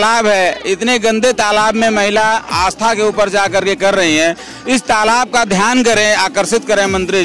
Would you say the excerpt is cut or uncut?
uncut